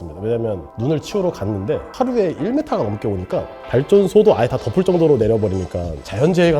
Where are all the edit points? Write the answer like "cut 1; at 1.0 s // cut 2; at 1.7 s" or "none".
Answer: cut 1; at 1.9 s

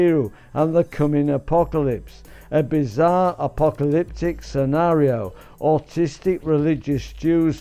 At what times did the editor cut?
none

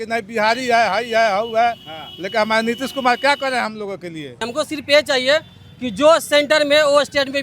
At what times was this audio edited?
cut 1; at 4.5 s

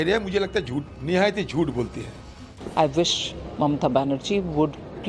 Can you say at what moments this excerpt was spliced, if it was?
cut 1; at 0.9 s // cut 2; at 2.4 s

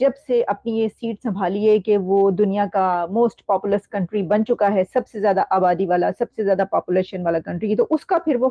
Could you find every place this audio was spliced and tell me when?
none

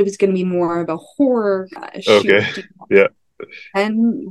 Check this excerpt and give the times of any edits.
cut 1; at 1.8 s

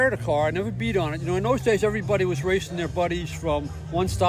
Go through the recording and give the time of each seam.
none

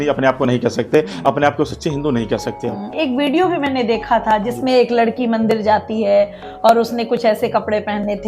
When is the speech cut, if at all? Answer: none

